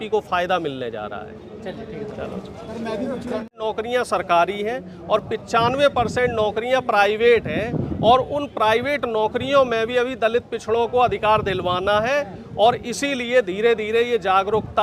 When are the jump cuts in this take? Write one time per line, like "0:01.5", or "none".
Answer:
0:03.6